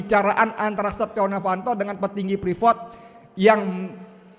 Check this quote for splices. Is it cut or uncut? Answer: uncut